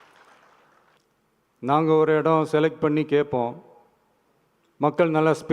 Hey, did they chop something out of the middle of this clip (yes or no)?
yes